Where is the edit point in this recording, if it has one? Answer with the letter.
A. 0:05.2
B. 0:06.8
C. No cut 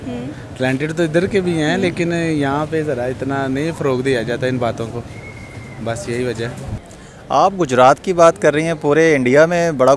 B